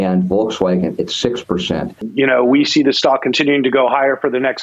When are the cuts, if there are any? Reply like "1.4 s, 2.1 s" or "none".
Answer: 2.0 s

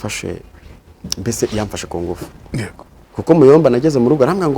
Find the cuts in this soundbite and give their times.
3.0 s

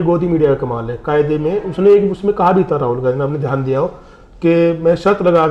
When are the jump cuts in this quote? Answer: none

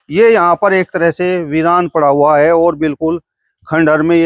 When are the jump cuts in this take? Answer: none

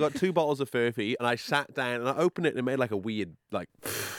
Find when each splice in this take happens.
1.2 s

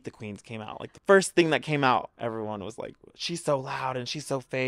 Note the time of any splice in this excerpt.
0.9 s, 2.1 s

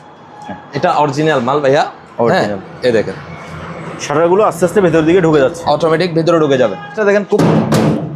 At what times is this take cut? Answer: 7.0 s

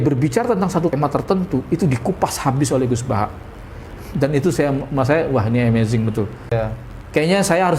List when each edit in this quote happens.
0.9 s, 6.5 s

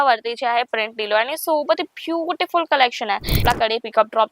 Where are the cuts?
3.4 s

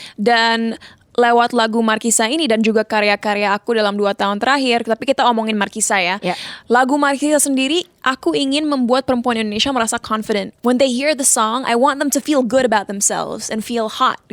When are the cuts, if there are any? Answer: none

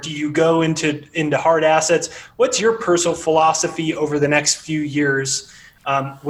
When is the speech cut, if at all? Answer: none

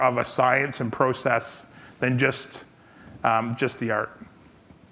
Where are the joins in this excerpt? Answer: none

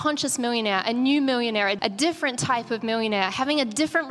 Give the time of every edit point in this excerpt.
1.8 s

